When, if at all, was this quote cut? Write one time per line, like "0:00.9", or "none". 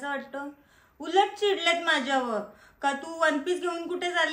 none